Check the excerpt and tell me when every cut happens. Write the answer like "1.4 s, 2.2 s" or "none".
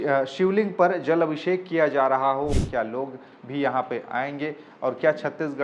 2.5 s